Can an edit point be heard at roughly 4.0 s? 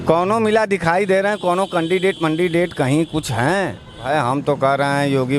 yes; 1 cut; at 4.0 s

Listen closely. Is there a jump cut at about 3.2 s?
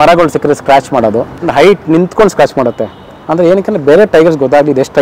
no; 1 cut; at 1.3 s

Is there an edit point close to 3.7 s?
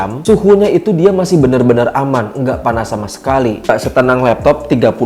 yes; 1 cut; at 3.7 s

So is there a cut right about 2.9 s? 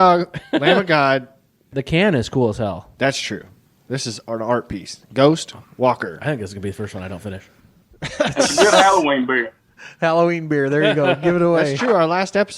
no; 1 cut; at 1.6 s

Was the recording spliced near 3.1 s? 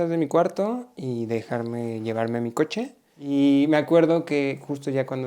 yes; 1 cut; at 3.1 s

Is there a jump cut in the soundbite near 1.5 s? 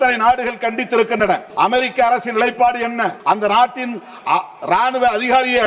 yes; 2 cuts; at 1.5 s, 3.2 s

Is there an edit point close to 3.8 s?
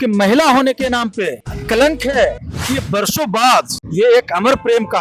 yes; 3 cuts; at 1.5 s, 2.6 s, 3.8 s

